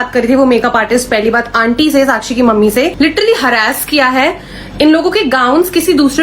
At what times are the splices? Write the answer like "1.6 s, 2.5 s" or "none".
2.9 s